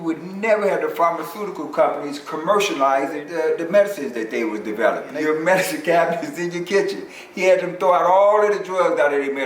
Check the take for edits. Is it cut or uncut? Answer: cut